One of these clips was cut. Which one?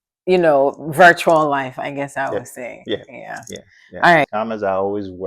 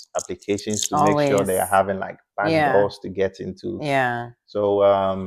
first; 1 cut; at 4.3 s

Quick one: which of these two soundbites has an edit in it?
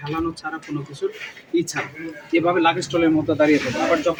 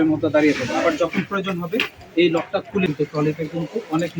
second; 1 cut; at 2.9 s

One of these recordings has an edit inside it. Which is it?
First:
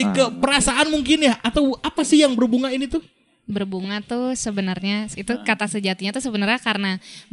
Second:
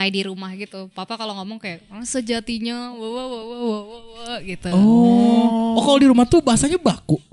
first; 1 cut; at 5.1 s

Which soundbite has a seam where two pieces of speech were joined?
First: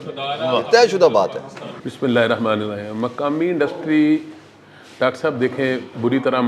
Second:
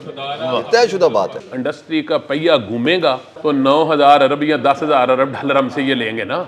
second; 2 cuts; at 1.4 s, 3.3 s

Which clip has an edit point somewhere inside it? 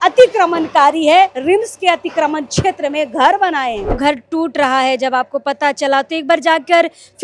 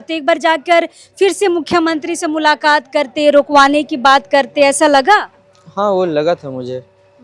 first; 1 cut; at 4.0 s

